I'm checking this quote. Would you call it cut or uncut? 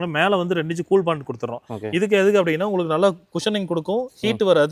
uncut